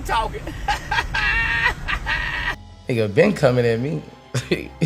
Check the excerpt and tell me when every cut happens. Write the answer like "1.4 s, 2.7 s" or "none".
2.7 s